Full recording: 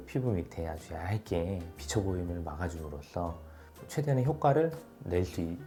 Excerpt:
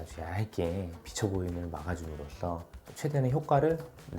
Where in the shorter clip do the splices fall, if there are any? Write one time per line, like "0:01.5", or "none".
0:02.8